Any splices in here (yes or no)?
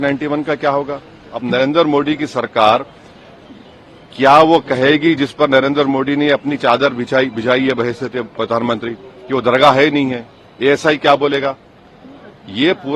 yes